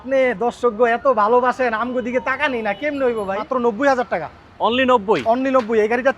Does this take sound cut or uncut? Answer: cut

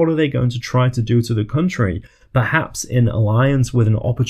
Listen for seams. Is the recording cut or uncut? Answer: uncut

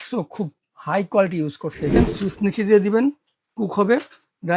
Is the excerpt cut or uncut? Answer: cut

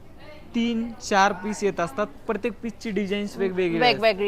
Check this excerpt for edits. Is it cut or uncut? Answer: uncut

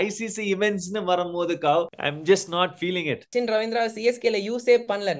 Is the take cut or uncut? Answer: cut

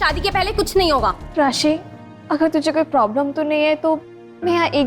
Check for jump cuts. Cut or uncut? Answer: cut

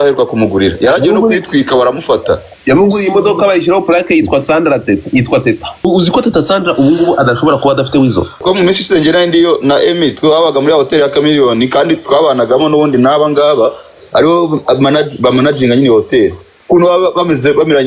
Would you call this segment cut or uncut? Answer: cut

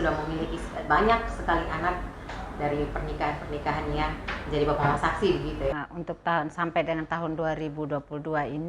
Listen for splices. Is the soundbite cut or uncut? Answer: cut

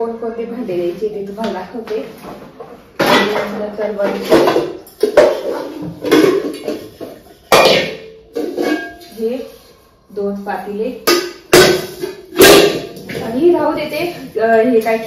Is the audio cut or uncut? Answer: uncut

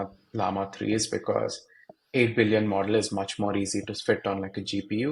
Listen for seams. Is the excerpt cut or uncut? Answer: uncut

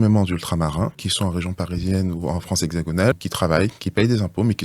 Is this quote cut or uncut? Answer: cut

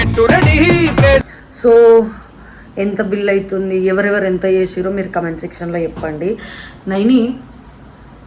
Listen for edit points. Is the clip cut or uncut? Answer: uncut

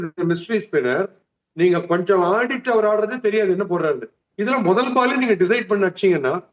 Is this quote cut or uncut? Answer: uncut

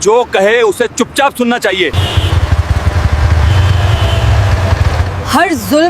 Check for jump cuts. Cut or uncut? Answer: cut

